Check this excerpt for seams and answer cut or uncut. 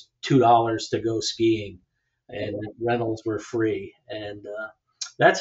uncut